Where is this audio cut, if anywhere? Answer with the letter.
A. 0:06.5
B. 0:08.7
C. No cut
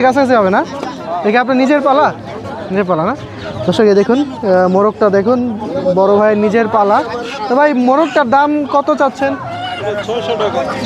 C